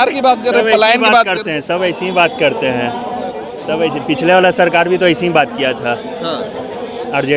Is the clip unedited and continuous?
yes; 0 cuts

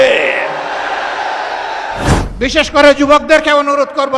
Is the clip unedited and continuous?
no; 1 cut; at 2.2 s

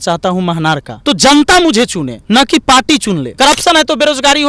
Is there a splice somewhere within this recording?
yes; 3 cuts; at 0.9 s, 2.1 s, 3.3 s

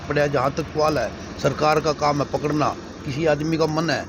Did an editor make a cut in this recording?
no; 0 cuts

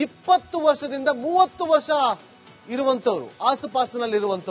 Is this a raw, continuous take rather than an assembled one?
yes; 0 cuts

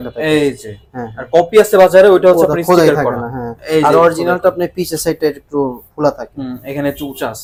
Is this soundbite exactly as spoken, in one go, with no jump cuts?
yes; 0 cuts

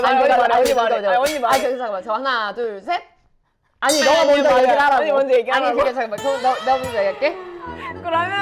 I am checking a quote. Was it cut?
yes; 1 cut; at 7.5 s

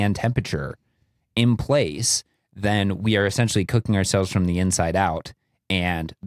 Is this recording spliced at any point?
no; 0 cuts

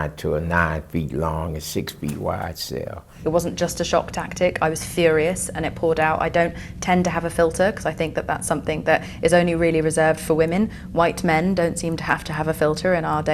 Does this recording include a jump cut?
yes; 1 cut; at 3.1 s

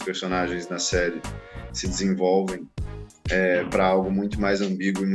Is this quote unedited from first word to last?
yes; 0 cuts

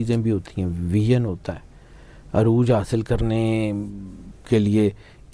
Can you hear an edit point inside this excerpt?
no; 0 cuts

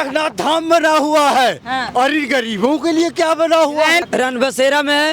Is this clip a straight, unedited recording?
no; 1 cut; at 4.0 s

